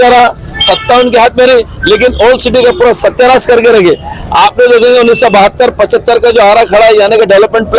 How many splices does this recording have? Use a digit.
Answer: 0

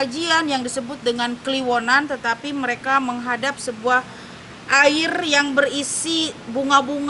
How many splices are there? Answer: 0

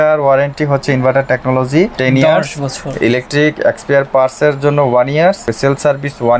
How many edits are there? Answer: 2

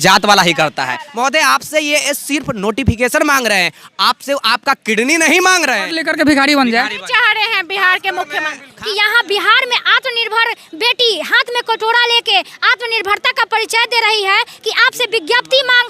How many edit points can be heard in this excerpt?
3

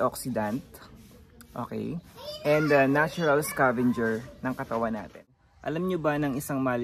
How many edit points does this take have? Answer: 1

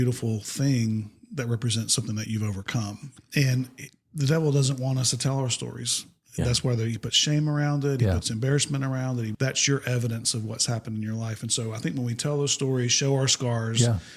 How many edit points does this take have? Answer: 2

